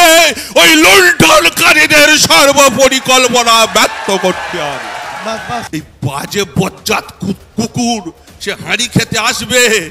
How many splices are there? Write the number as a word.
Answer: one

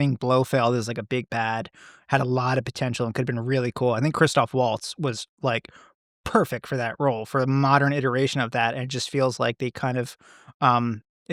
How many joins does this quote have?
zero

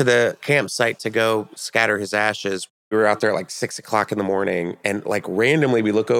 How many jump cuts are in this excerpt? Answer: one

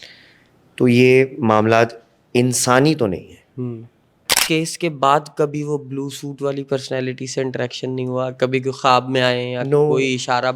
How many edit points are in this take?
one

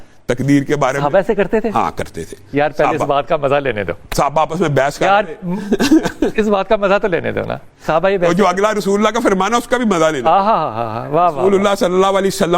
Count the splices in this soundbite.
zero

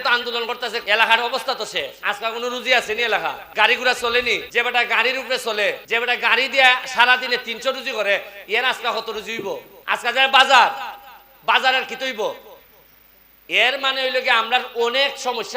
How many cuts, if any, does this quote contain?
six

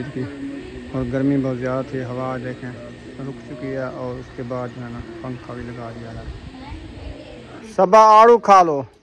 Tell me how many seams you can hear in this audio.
one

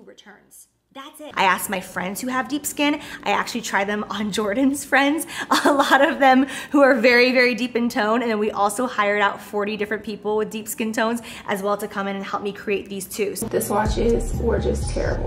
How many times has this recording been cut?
two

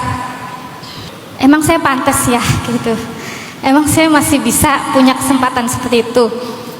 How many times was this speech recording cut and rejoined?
one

